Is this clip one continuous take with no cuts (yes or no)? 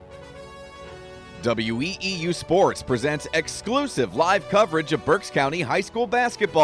no